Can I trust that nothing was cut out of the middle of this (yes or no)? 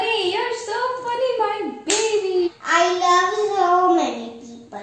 no